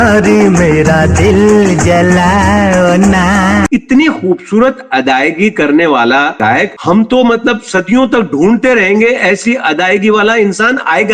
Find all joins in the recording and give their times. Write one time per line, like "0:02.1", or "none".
0:03.7